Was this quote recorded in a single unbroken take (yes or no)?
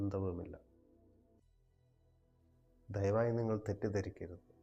no